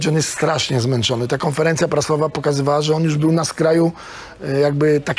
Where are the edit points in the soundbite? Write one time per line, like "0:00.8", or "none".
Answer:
none